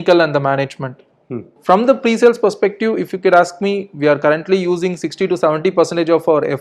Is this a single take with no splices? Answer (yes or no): no